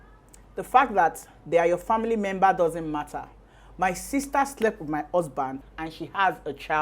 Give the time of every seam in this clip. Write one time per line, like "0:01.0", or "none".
0:05.6